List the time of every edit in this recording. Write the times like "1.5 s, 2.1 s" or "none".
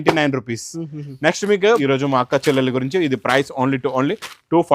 1.8 s